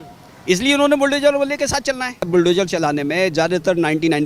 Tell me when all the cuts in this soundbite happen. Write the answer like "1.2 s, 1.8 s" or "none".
2.3 s